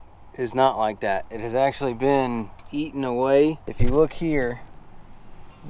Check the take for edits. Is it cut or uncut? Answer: cut